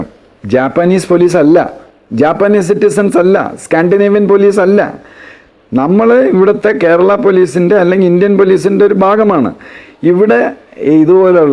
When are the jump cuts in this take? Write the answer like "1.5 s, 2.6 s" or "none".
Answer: none